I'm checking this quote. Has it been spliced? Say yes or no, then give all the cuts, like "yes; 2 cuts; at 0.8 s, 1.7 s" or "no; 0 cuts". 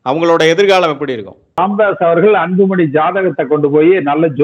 yes; 1 cut; at 1.6 s